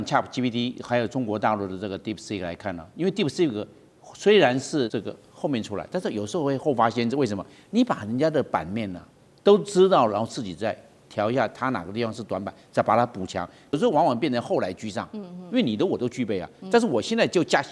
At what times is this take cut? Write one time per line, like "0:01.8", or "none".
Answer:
0:04.9
0:13.7